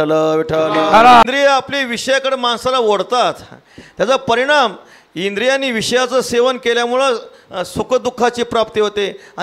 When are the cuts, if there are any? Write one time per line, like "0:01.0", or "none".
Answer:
0:01.2